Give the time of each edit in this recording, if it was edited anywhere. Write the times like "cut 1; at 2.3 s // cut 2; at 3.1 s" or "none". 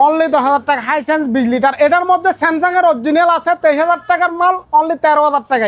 none